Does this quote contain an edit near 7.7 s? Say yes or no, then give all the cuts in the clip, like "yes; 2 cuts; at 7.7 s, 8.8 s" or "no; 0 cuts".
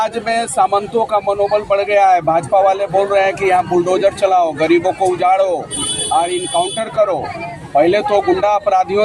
no; 0 cuts